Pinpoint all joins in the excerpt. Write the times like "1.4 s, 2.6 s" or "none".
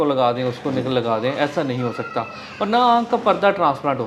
none